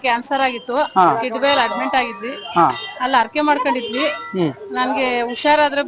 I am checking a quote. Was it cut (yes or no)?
no